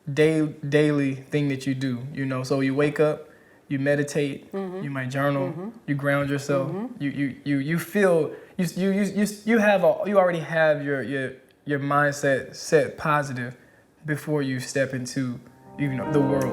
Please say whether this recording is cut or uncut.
uncut